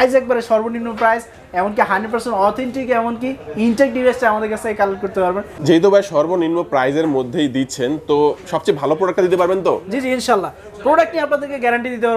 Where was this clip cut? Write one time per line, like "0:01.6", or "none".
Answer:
0:05.5

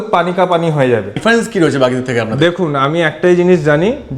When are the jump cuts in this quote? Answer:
0:01.1

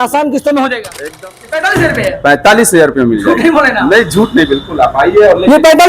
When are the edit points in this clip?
0:01.1

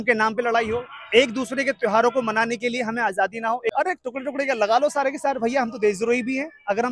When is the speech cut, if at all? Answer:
0:03.7

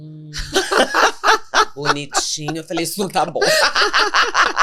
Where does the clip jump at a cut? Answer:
none

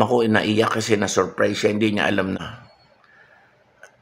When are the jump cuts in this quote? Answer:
0:02.4

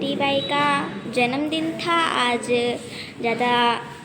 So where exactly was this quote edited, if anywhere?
none

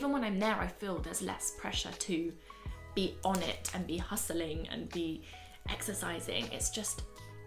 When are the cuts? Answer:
none

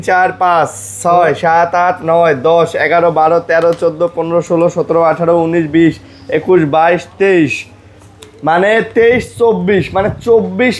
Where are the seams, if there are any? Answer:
none

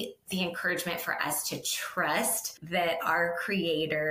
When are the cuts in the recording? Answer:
0:02.5

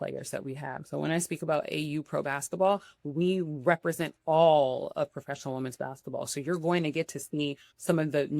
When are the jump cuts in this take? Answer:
none

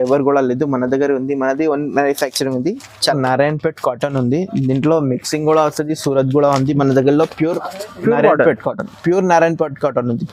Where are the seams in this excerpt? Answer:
0:03.1

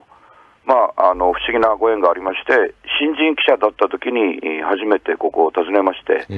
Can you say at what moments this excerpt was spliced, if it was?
none

